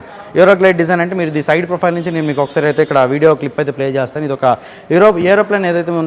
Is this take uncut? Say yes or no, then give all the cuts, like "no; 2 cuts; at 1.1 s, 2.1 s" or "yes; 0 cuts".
yes; 0 cuts